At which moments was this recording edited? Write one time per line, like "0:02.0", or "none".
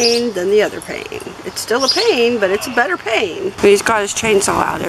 0:03.5